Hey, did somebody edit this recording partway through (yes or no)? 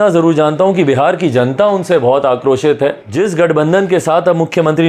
yes